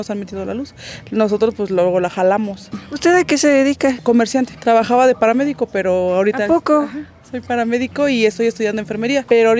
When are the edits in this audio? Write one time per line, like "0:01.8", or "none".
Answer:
none